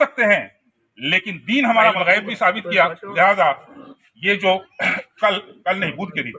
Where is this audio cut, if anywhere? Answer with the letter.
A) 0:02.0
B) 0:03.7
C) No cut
A